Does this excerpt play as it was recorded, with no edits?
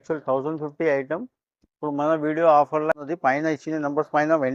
no; 1 cut; at 2.9 s

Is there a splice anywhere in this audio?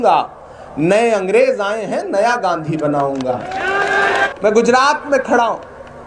yes; 1 cut; at 4.3 s

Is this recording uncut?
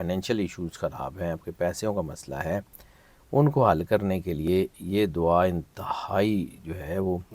yes; 0 cuts

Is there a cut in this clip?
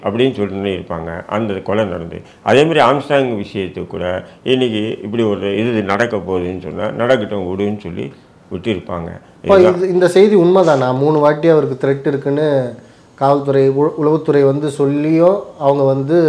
no; 0 cuts

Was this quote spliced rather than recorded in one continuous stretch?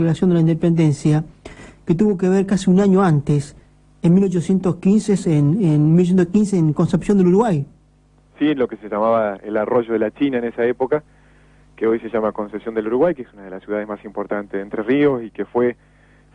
yes; 1 cut; at 14.5 s

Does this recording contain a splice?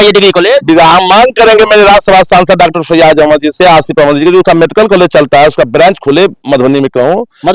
no; 0 cuts

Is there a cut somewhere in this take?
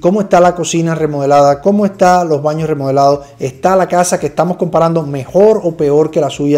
no; 0 cuts

